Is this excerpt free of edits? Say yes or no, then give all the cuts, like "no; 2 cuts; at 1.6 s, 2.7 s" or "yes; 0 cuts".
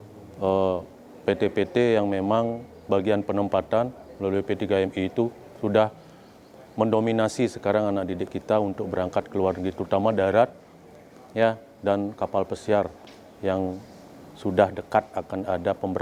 yes; 0 cuts